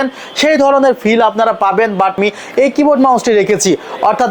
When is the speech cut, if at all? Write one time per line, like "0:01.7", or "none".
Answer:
0:02.2